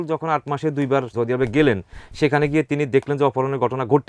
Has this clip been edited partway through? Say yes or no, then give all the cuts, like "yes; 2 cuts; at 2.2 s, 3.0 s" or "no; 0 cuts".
yes; 1 cut; at 1.1 s